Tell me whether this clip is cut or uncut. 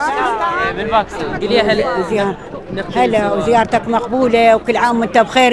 uncut